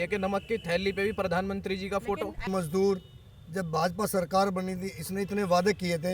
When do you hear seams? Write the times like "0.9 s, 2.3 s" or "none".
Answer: 2.5 s